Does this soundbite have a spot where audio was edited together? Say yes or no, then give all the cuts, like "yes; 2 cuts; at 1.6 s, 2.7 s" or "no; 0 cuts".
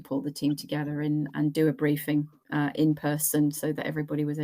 yes; 1 cut; at 1.5 s